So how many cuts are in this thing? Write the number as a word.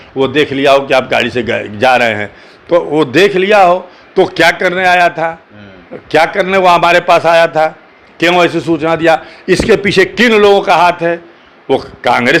zero